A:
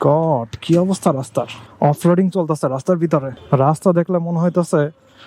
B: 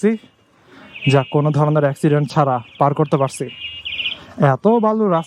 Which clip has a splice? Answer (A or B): A